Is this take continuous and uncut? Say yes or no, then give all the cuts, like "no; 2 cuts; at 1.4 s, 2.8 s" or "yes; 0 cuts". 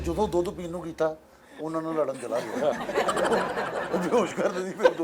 yes; 0 cuts